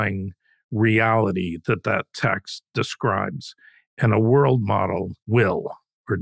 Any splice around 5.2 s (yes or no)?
yes